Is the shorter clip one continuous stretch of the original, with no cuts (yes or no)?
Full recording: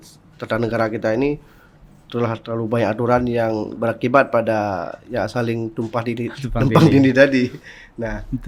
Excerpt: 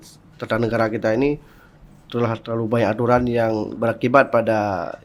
yes